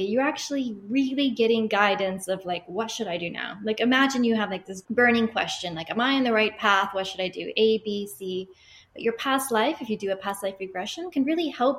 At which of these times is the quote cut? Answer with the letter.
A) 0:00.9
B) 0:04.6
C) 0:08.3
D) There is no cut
D